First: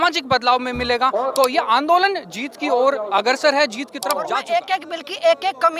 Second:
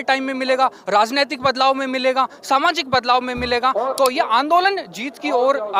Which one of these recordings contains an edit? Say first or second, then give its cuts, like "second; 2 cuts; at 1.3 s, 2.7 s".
first; 1 cut; at 4.3 s